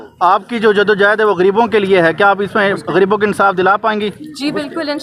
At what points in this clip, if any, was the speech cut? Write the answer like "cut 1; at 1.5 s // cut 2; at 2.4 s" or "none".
none

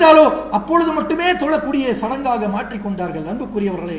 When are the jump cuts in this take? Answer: none

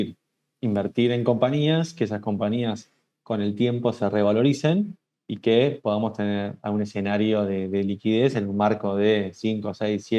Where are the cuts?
none

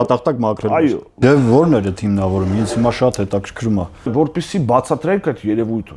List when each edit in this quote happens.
cut 1; at 1.1 s // cut 2; at 4.1 s

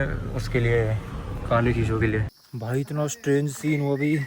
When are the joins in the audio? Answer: cut 1; at 2.4 s

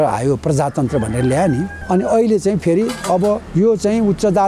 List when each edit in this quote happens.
cut 1; at 1.8 s // cut 2; at 3.4 s

